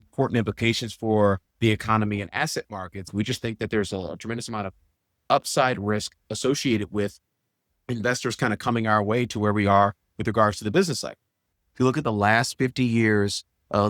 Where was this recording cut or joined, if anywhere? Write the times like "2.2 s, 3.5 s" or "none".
3.1 s, 11.5 s